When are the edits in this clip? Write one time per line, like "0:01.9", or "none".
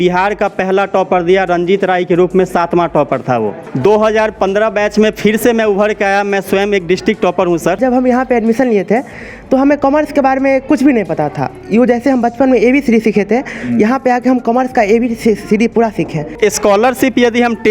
0:03.6
0:07.8
0:16.4